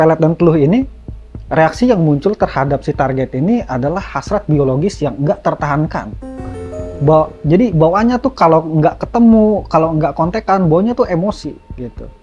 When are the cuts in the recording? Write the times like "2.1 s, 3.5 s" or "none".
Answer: none